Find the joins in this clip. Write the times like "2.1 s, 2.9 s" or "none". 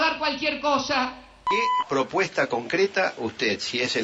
1.4 s